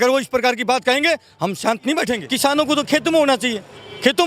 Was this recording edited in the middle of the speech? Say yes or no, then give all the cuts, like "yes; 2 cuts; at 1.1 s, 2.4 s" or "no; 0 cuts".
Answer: yes; 1 cut; at 2.3 s